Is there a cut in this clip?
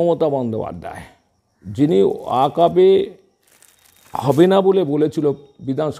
no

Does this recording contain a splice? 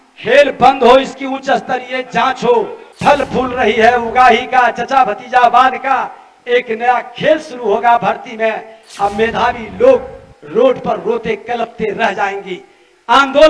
yes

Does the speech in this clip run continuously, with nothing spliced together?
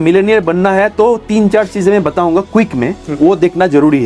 yes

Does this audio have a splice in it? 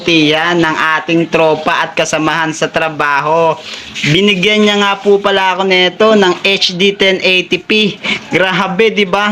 yes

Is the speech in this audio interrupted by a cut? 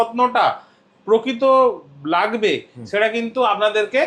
no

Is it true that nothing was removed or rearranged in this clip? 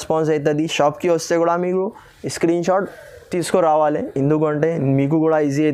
yes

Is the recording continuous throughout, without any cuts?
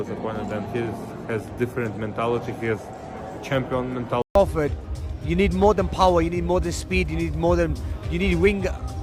no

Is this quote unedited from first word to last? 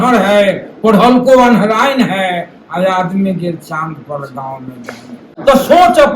no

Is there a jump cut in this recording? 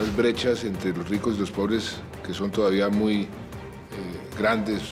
no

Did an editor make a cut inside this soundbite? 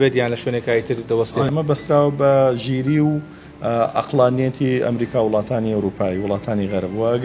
yes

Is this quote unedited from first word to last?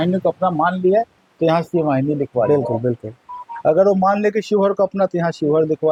yes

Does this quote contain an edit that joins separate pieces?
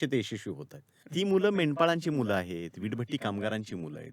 yes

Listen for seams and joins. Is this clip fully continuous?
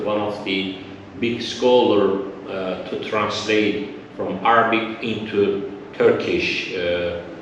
yes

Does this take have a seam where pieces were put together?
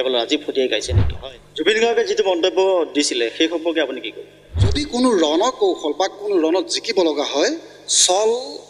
yes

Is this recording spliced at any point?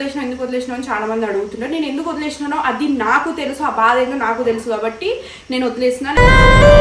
no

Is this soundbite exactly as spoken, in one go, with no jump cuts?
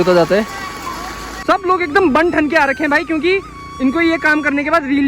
no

